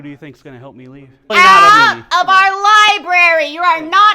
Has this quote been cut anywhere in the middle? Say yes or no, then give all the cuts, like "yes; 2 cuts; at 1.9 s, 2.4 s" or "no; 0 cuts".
yes; 1 cut; at 1.3 s